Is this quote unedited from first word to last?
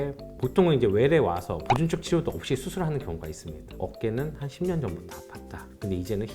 no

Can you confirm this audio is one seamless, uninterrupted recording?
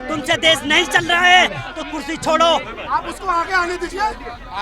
no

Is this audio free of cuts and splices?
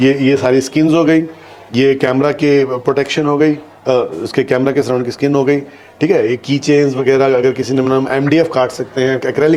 yes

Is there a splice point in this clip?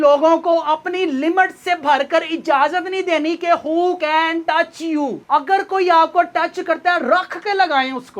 no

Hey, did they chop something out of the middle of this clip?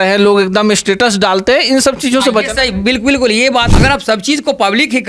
yes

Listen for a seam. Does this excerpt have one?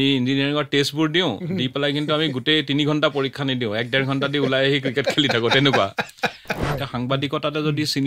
yes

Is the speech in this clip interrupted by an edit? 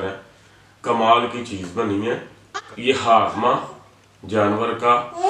yes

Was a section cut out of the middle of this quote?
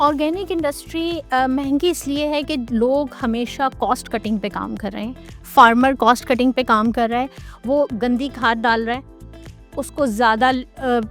no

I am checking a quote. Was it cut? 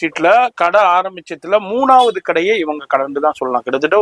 no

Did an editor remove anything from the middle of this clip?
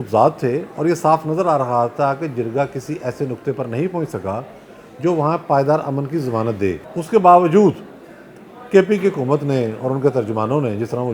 yes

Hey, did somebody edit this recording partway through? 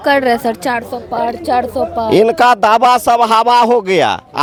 no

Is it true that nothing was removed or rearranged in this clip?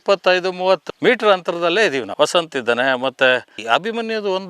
no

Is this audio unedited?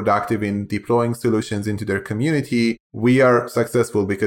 no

